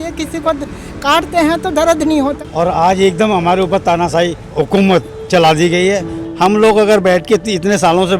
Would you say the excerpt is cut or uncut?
cut